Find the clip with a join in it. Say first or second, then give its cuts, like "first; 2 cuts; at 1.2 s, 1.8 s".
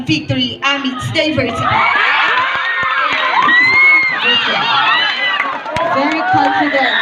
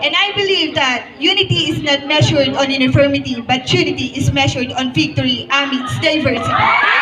first; 1 cut; at 4.1 s